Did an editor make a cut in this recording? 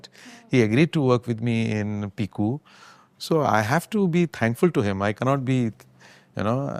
no; 0 cuts

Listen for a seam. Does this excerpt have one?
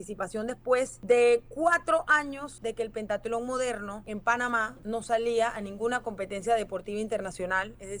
yes; 4 cuts; at 1.0 s, 2.5 s, 4.0 s, 4.7 s

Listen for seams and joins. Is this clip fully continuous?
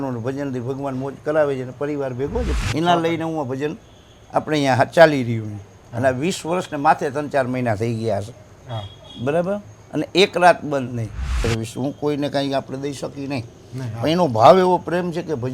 no; 2 cuts; at 2.6 s, 11.4 s

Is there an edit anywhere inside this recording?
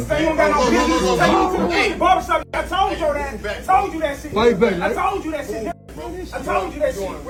no; 0 cuts

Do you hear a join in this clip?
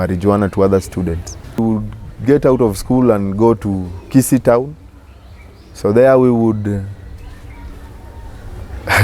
yes; 1 cut; at 1.6 s

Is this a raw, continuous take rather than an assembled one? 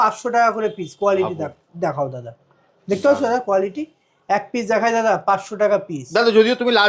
yes; 0 cuts

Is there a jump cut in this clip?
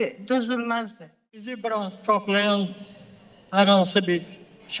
yes; 1 cut; at 1.5 s

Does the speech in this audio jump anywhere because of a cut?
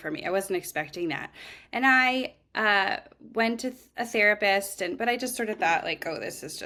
no; 0 cuts

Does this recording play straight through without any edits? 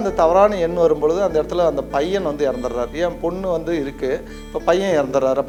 yes; 0 cuts

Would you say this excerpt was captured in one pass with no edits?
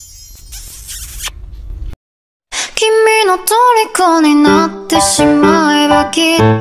yes; 0 cuts

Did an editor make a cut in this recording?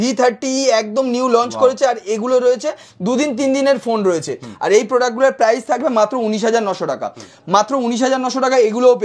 no; 0 cuts

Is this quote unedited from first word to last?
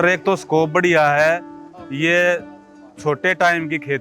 yes; 0 cuts

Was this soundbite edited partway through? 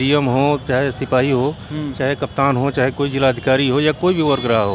no; 0 cuts

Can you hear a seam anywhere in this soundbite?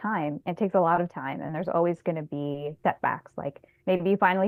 no; 0 cuts

